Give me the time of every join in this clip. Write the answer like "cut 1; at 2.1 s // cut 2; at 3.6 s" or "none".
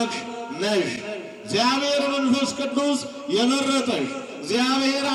none

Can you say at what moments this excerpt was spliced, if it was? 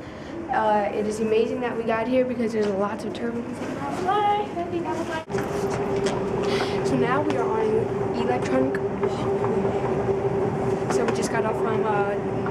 cut 1; at 5.2 s

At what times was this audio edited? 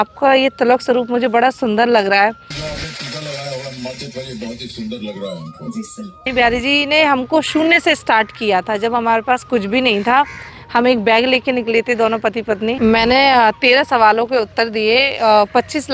cut 1; at 2.5 s // cut 2; at 6.3 s // cut 3; at 12.8 s

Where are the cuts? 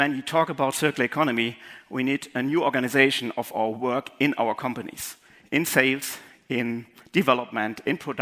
none

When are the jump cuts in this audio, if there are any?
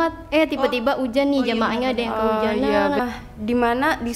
cut 1; at 3.0 s

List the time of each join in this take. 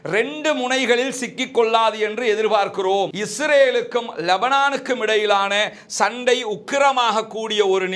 cut 1; at 3.1 s

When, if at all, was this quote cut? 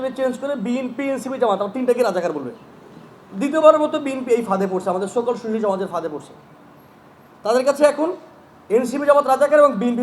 none

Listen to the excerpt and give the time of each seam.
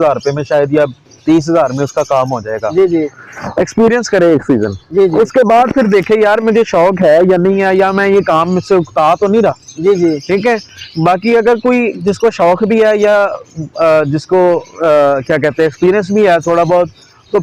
none

